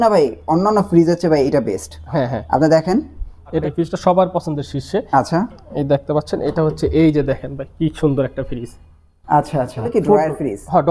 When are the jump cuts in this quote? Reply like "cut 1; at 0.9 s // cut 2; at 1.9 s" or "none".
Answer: cut 1; at 3.6 s // cut 2; at 9.9 s